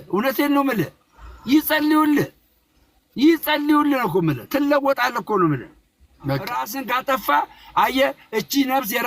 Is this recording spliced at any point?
yes; 1 cut; at 6.7 s

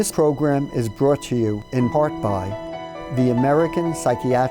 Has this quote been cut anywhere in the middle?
yes; 1 cut; at 2.5 s

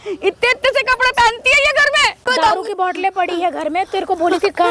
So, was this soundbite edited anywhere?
yes; 1 cut; at 2.2 s

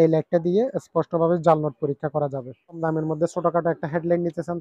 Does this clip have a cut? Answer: yes; 1 cut; at 2.8 s

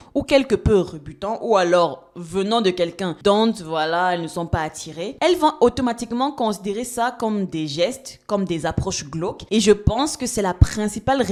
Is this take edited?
no; 0 cuts

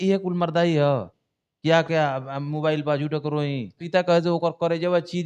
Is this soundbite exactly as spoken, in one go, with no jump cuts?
no; 1 cut; at 3.8 s

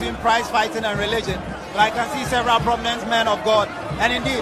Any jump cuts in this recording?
no; 0 cuts

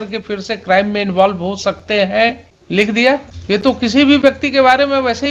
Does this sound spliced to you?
yes; 2 cuts; at 2.5 s, 3.3 s

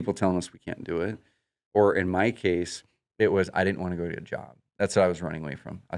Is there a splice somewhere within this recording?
no; 0 cuts

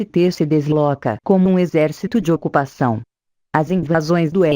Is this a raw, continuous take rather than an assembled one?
no; 1 cut; at 3.0 s

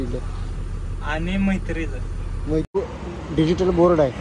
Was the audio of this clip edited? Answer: yes; 1 cut; at 2.8 s

